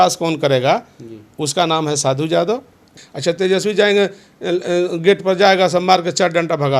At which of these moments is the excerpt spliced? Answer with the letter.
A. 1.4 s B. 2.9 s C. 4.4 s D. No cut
B